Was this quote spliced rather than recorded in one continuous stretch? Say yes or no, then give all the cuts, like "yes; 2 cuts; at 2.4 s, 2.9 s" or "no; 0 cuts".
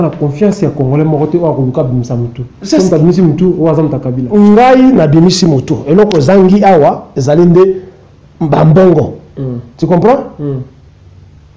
no; 0 cuts